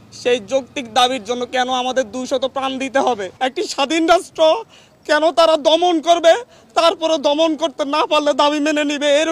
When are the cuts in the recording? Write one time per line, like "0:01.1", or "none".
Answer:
0:03.3